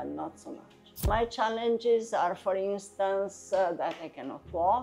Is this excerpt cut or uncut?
cut